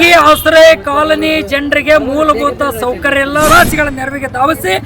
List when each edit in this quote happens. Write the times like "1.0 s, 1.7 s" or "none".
3.5 s